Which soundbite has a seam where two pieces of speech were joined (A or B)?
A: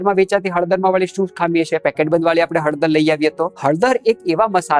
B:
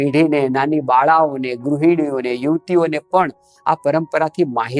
A